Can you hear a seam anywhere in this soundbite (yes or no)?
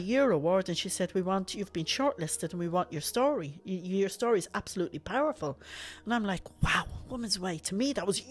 no